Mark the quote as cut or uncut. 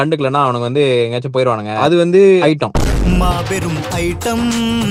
uncut